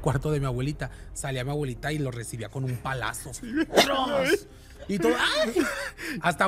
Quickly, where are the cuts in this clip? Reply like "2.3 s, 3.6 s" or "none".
none

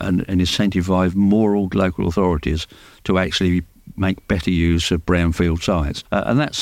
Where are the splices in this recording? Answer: none

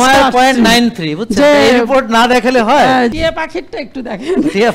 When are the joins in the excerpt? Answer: 3.1 s

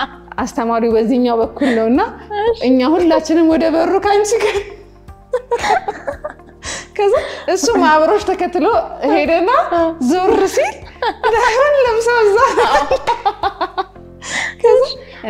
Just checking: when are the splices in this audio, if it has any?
none

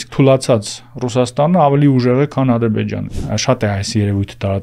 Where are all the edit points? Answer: 3.0 s

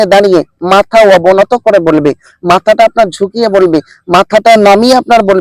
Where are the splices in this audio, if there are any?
none

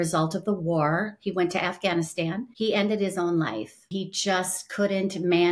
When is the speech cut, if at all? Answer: 2.5 s, 3.9 s

